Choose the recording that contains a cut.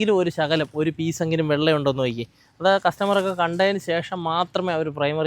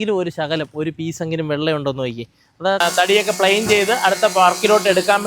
second; 1 cut; at 2.8 s

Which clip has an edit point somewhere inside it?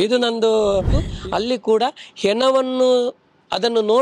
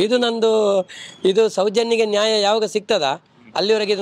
first; 1 cut; at 1.0 s

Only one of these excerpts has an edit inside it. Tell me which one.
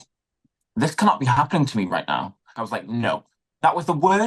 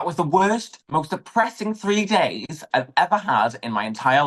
first; 1 cut; at 2.5 s

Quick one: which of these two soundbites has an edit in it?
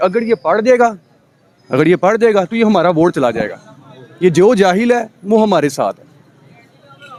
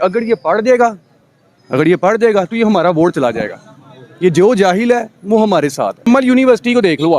second; 1 cut; at 6.1 s

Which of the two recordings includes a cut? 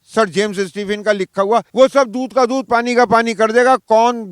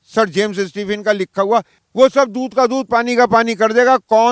first; 1 cut; at 1.7 s

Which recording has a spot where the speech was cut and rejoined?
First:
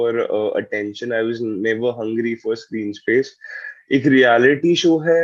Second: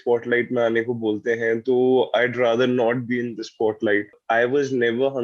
second; 1 cut; at 4.2 s

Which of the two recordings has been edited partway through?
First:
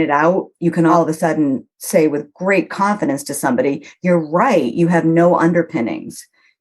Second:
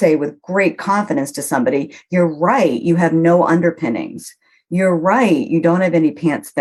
first; 1 cut; at 0.9 s

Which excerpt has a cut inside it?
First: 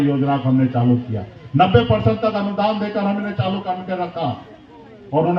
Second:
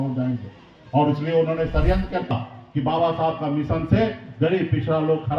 second; 1 cut; at 2.3 s

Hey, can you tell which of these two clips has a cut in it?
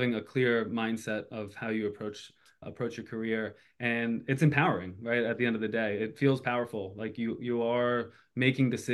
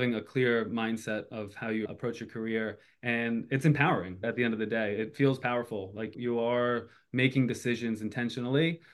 second; 3 cuts; at 1.9 s, 4.2 s, 6.1 s

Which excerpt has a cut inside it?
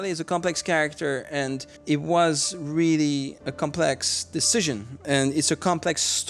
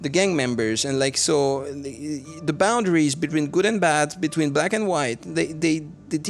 first; 3 cuts; at 1.7 s, 3.4 s, 5.0 s

